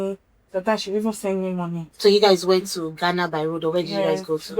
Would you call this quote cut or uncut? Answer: cut